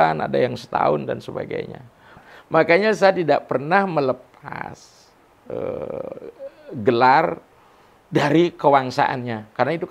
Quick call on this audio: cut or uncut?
cut